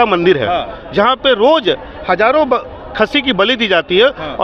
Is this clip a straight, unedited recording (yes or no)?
yes